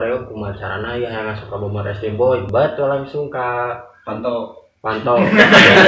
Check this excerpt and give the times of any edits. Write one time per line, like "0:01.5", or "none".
0:02.5